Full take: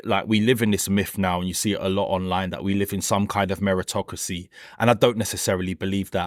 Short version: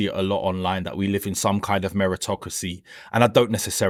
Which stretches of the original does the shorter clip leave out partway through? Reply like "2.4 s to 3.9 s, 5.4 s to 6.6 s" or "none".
none